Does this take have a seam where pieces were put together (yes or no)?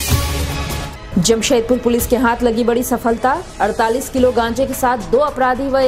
no